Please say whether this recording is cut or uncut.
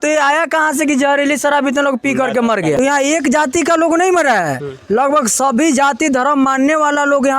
cut